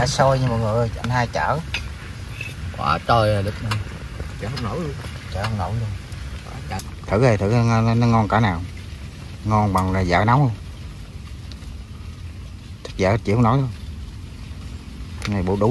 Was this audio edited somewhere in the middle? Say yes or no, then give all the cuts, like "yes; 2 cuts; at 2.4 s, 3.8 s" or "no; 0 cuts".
yes; 1 cut; at 6.8 s